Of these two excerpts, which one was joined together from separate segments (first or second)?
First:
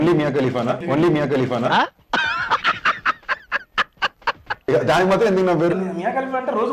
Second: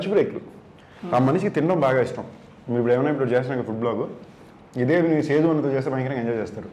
first